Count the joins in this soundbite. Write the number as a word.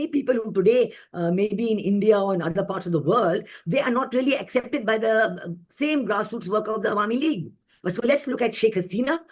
one